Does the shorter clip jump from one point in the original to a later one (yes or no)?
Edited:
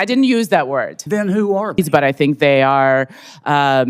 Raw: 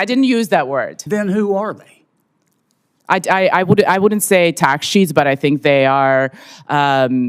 yes